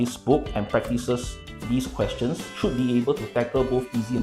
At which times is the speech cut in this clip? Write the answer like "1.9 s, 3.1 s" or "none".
none